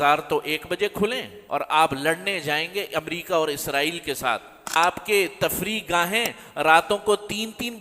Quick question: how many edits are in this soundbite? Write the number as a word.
two